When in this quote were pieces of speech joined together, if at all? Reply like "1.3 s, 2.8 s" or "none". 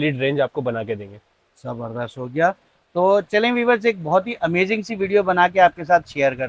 none